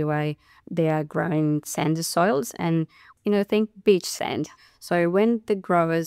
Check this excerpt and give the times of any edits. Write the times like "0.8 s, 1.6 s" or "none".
3.1 s, 4.4 s